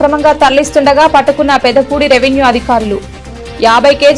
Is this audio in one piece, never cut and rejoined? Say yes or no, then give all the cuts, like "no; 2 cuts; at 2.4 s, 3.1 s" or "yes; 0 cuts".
yes; 0 cuts